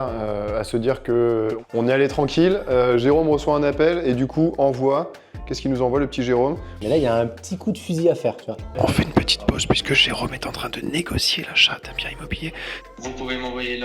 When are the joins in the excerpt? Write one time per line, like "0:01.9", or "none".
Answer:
0:06.7
0:08.7
0:12.8